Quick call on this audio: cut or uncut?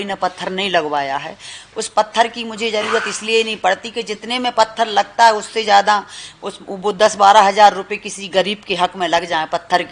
uncut